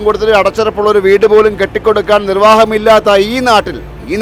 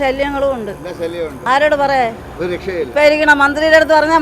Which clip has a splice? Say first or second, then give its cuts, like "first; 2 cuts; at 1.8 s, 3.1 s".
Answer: second; 1 cut; at 1.4 s